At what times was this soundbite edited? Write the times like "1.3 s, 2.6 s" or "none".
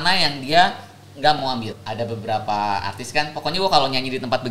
1.6 s